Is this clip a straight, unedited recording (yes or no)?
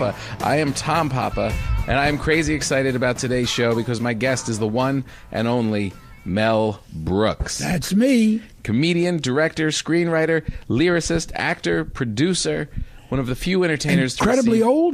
yes